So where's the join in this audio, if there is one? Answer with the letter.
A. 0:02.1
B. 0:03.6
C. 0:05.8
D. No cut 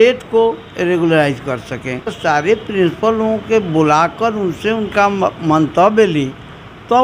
A